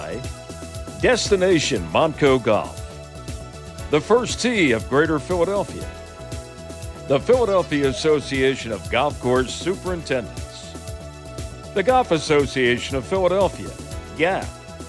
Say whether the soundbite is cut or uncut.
uncut